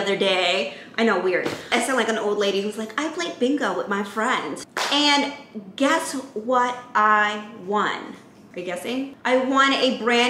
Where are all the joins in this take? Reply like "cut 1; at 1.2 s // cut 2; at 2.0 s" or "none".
cut 1; at 1.7 s // cut 2; at 4.6 s